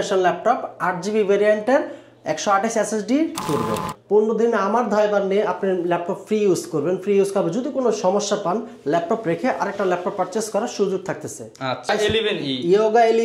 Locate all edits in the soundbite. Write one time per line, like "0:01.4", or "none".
0:03.4
0:11.9

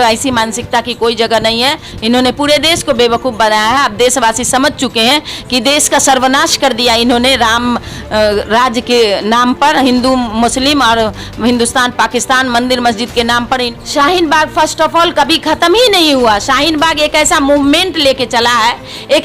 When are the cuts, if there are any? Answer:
0:01.9
0:13.7

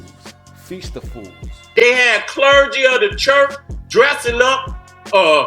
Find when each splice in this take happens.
0:01.8

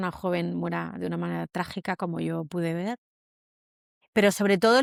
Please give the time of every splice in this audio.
none

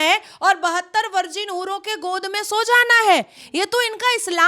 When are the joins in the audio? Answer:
none

